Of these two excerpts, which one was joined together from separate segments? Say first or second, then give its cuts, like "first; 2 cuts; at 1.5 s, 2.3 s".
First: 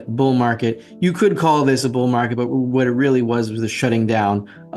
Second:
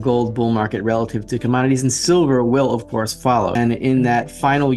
second; 1 cut; at 3.6 s